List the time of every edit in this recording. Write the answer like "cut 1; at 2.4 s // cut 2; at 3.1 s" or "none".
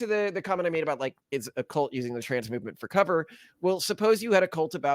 cut 1; at 1.2 s